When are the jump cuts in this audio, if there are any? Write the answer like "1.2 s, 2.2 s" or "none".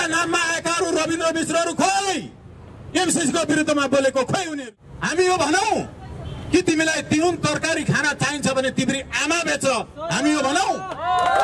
4.5 s